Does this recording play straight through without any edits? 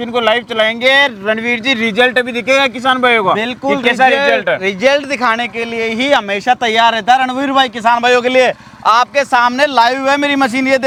yes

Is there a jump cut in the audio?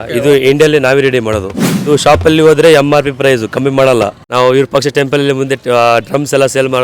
yes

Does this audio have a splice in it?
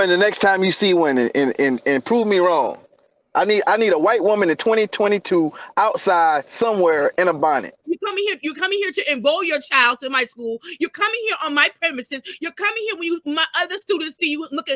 yes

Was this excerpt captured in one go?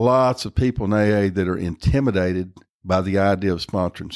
yes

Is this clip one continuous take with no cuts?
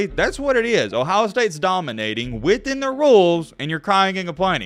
yes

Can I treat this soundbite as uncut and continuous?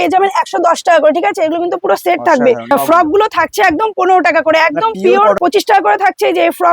no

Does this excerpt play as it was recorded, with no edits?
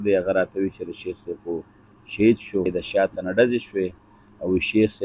no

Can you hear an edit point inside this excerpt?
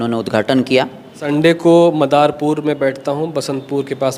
yes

